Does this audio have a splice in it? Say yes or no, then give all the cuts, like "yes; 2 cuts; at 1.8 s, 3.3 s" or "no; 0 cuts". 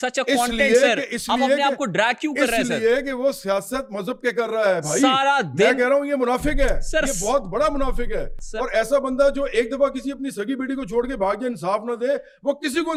no; 0 cuts